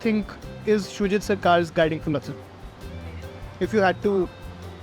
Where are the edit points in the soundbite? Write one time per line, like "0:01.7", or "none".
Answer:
none